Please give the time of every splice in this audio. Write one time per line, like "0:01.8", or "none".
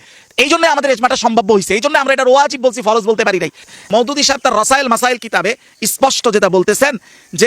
0:03.7